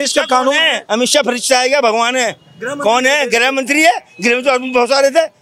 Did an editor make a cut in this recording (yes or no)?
no